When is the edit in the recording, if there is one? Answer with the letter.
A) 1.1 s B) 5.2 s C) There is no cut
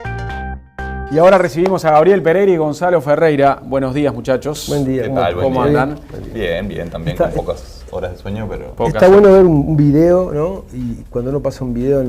A